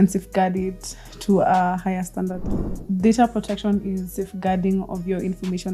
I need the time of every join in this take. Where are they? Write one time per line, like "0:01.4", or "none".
0:02.7